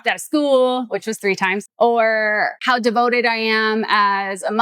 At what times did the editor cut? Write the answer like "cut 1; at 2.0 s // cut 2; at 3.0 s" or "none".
cut 1; at 1.7 s // cut 2; at 2.6 s